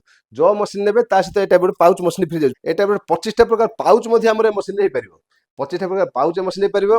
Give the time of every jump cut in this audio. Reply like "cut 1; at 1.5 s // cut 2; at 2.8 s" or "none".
cut 1; at 2.6 s

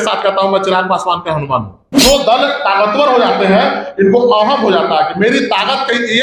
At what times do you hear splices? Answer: cut 1; at 1.8 s

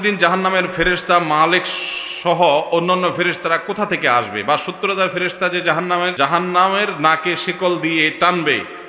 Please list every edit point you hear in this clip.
cut 1; at 6.1 s

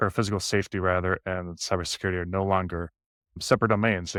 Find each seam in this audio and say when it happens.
none

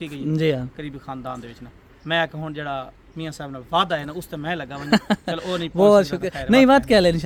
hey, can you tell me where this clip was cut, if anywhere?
none

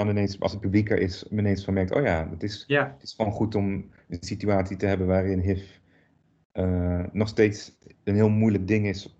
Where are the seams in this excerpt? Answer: none

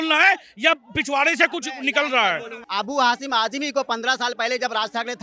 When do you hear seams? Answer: cut 1; at 2.6 s

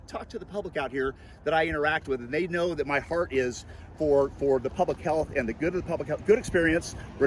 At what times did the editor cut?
none

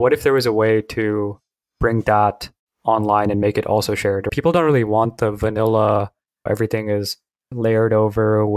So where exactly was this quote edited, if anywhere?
cut 1; at 6.4 s

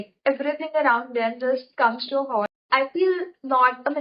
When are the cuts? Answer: cut 1; at 2.4 s

